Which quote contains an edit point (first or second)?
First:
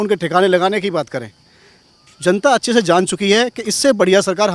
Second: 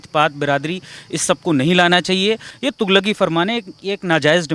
second